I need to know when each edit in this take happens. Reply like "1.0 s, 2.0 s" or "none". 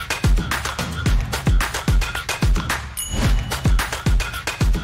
none